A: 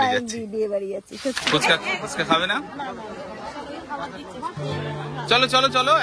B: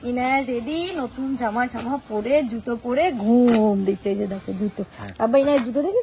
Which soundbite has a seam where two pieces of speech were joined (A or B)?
A